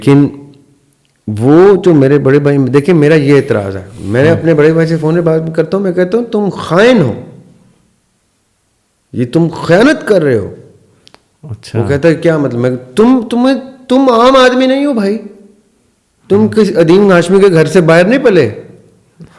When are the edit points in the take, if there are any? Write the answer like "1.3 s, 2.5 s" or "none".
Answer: none